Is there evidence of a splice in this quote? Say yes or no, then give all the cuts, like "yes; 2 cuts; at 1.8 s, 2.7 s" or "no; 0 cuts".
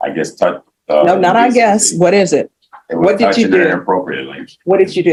no; 0 cuts